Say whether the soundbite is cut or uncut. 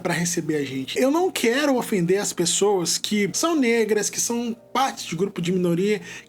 cut